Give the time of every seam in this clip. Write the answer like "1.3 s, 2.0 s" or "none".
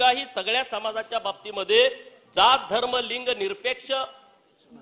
none